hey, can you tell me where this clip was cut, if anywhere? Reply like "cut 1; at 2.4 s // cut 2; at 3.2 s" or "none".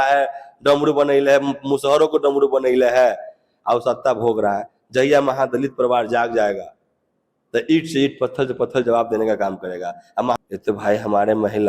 cut 1; at 10.4 s